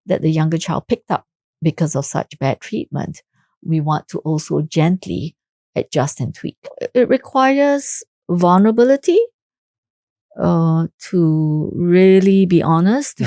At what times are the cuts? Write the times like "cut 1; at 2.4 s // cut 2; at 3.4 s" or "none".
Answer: cut 1; at 6.8 s

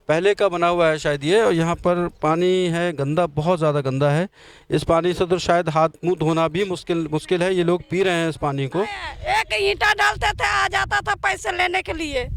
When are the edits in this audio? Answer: cut 1; at 9.1 s

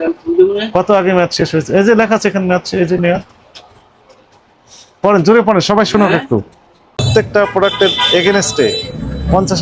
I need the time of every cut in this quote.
cut 1; at 7.1 s

